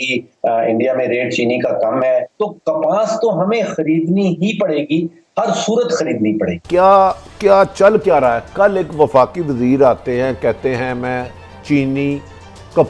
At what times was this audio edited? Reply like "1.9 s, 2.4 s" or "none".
2.3 s, 6.6 s